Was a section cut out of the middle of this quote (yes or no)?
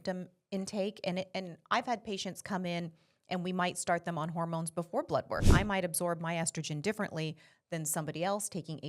yes